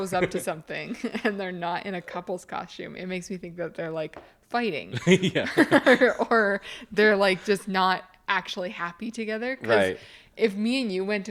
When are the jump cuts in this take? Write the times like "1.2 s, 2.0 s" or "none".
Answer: none